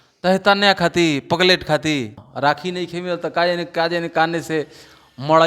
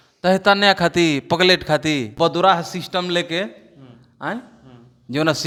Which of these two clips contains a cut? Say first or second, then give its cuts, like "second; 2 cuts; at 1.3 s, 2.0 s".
first; 1 cut; at 2.1 s